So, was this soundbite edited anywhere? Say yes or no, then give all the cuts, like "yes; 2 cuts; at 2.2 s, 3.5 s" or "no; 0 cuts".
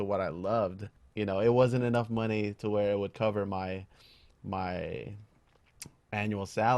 yes; 1 cut; at 1.0 s